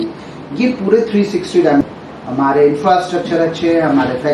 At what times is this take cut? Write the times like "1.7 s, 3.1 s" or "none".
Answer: 1.8 s